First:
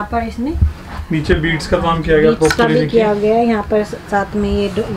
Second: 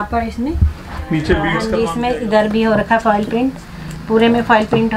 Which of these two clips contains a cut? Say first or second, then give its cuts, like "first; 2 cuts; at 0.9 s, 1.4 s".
second; 1 cut; at 1.6 s